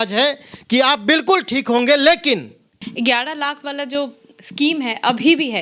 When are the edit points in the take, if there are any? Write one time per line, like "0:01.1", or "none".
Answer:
0:02.8